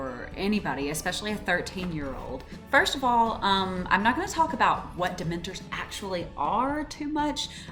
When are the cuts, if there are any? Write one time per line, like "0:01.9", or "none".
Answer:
none